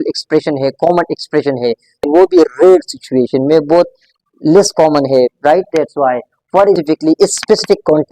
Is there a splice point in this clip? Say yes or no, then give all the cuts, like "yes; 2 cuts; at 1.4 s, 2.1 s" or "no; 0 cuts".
yes; 2 cuts; at 2.0 s, 6.8 s